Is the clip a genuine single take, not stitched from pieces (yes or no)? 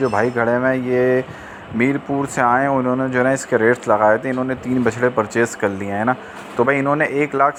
yes